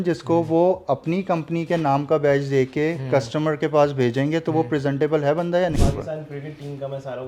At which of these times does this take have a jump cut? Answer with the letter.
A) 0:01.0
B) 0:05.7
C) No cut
B